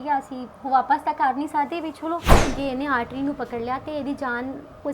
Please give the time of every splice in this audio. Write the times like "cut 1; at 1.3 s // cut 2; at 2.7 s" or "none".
cut 1; at 2.4 s